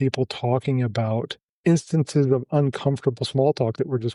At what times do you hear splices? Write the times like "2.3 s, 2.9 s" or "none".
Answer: 1.5 s